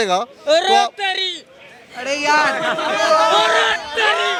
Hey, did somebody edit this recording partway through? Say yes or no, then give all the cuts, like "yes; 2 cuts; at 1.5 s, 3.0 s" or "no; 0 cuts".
no; 0 cuts